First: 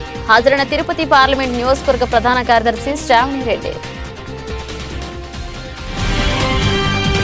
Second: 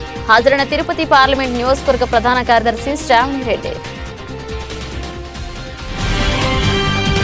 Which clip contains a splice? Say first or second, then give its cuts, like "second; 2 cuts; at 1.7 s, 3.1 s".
second; 1 cut; at 3.7 s